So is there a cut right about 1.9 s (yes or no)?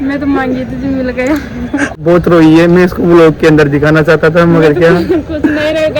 yes